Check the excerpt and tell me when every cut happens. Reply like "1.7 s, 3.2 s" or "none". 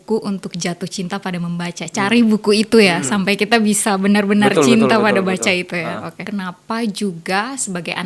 6.2 s